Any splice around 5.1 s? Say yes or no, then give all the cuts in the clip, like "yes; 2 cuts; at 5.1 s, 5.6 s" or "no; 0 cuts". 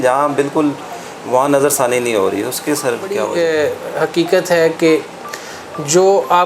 no; 1 cut; at 3.3 s